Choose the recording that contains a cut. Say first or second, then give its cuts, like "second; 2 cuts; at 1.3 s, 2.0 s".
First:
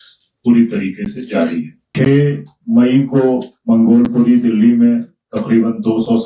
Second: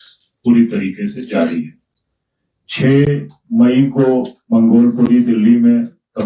first; 1 cut; at 1.8 s